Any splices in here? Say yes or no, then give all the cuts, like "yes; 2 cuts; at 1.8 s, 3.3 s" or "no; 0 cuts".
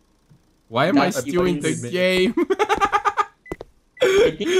no; 0 cuts